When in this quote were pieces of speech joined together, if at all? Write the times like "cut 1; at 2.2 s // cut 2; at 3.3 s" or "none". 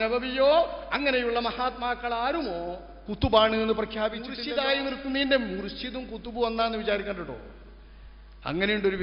cut 1; at 4.4 s

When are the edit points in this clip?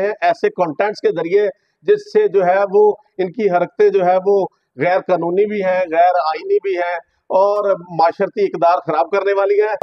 none

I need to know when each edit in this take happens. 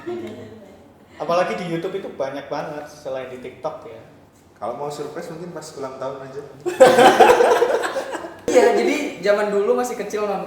cut 1; at 8.5 s

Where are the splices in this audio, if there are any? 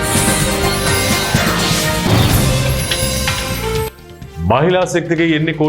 cut 1; at 1.6 s

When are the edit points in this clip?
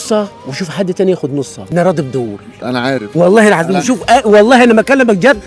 cut 1; at 1.6 s

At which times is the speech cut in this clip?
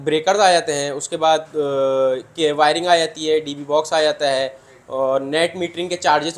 none

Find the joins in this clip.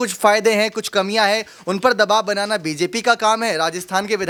none

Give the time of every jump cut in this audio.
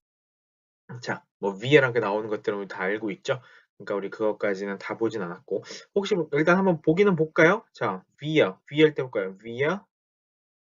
cut 1; at 1.3 s

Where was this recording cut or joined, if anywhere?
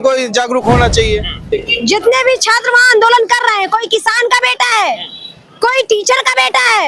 cut 1; at 1.5 s

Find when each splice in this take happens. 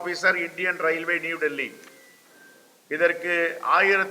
none

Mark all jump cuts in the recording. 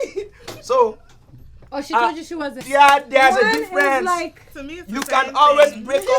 cut 1; at 2.6 s

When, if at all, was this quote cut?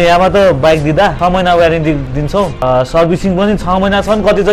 cut 1; at 1.1 s // cut 2; at 2.6 s

